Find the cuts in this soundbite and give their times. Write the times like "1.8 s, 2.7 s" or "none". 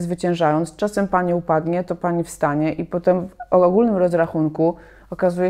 none